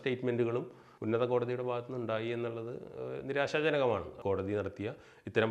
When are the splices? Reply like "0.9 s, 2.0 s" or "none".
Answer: 4.1 s